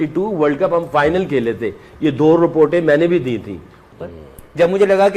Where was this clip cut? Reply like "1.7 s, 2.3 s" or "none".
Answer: 3.8 s